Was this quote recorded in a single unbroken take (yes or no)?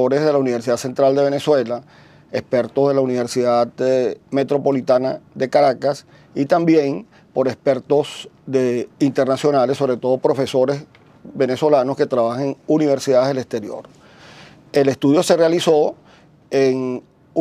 yes